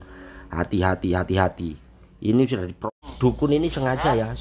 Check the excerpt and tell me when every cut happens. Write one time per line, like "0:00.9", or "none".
0:02.9